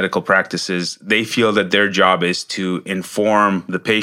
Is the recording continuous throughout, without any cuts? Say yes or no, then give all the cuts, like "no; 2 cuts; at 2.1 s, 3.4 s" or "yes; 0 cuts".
yes; 0 cuts